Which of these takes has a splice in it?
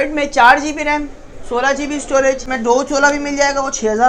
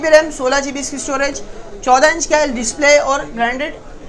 first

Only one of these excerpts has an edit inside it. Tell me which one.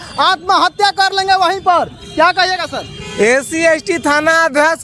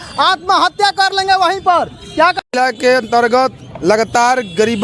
second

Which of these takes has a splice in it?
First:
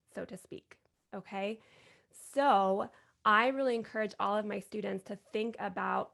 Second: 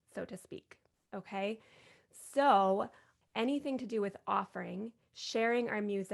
second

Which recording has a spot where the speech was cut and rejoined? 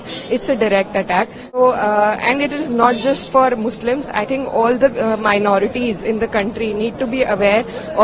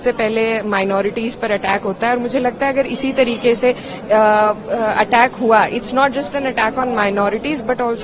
first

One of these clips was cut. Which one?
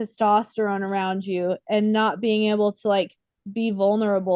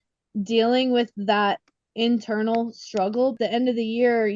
second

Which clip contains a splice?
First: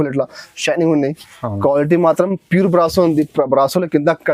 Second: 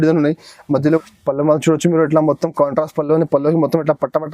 second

